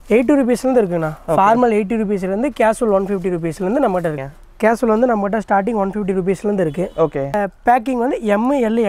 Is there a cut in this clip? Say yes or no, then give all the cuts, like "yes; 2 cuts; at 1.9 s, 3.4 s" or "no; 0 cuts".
yes; 2 cuts; at 4.2 s, 7.3 s